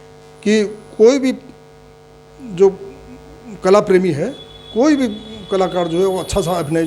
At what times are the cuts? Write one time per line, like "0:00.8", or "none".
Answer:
none